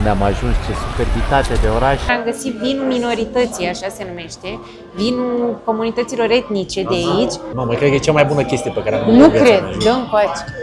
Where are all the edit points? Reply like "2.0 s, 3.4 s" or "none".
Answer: 2.1 s, 7.4 s